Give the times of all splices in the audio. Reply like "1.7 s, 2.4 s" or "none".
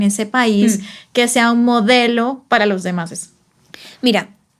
none